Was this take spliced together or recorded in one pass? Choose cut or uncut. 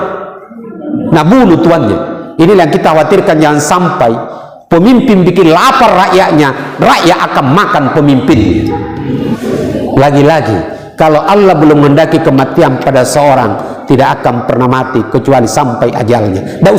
cut